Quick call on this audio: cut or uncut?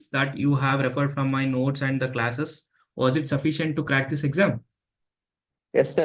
uncut